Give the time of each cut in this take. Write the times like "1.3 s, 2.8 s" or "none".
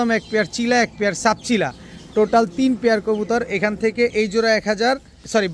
none